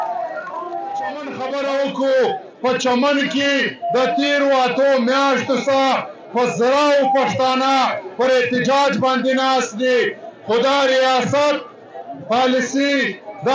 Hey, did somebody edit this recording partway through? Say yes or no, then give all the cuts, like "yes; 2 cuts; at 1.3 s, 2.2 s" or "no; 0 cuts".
yes; 1 cut; at 1.4 s